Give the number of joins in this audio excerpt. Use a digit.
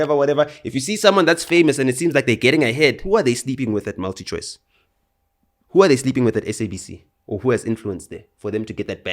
1